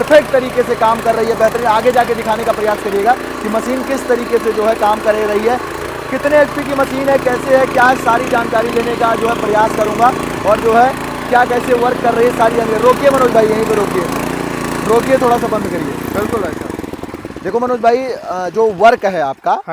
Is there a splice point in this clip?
no; 0 cuts

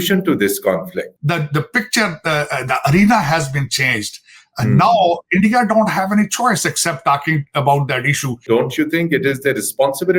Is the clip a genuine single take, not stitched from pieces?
no; 2 cuts; at 1.1 s, 8.4 s

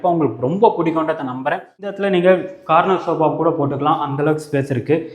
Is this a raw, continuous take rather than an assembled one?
no; 1 cut; at 2.0 s

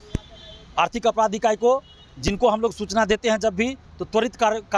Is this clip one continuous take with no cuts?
yes; 0 cuts

